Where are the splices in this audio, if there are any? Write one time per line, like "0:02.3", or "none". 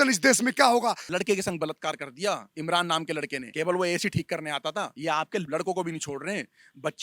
0:01.0
0:02.5
0:03.4
0:05.4